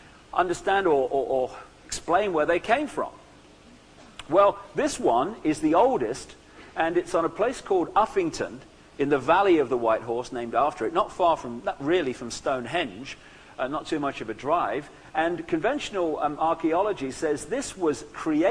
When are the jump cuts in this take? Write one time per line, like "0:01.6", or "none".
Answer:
0:01.9